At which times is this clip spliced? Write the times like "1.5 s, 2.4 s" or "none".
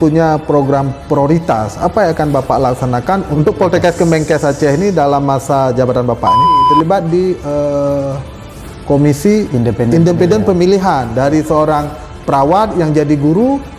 3.3 s, 6.6 s

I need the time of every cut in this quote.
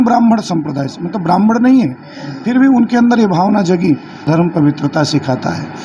4.2 s

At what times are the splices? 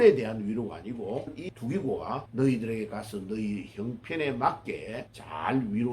1.4 s

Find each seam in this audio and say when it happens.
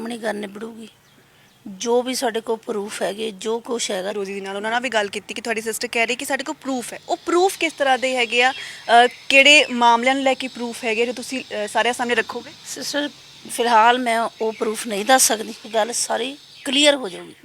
4.1 s, 15.6 s

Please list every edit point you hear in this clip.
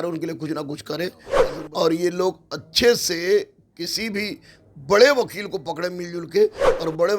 1.3 s

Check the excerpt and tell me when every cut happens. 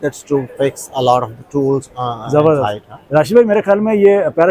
none

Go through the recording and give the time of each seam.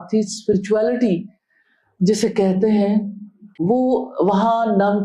none

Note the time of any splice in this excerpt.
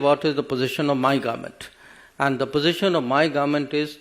none

